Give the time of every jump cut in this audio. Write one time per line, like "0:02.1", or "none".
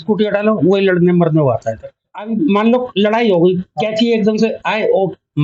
0:02.2

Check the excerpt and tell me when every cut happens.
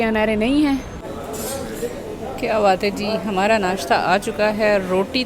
0:01.0

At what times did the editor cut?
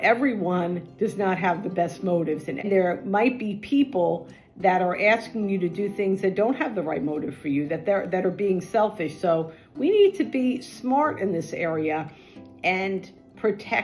0:02.6

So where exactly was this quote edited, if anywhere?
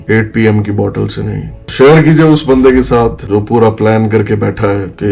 0:01.6

